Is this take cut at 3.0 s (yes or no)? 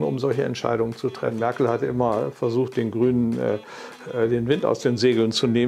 no